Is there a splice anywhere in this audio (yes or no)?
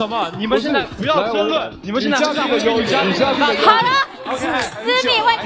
no